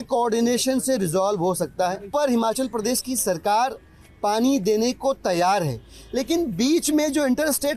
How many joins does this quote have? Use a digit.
1